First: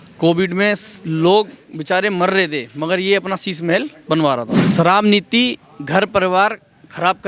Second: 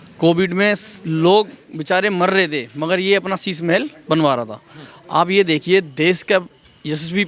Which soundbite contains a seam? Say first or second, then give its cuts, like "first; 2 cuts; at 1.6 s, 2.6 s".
first; 1 cut; at 4.6 s